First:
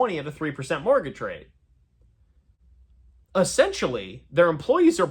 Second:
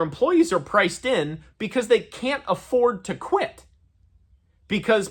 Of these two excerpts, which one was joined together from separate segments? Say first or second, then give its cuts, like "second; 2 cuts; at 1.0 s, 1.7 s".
first; 1 cut; at 2.0 s